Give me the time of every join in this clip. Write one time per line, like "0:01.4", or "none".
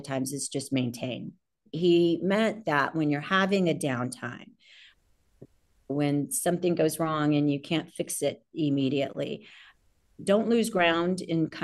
0:01.6